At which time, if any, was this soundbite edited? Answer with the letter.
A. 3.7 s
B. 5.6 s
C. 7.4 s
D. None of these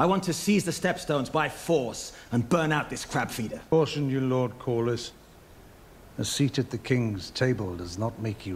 A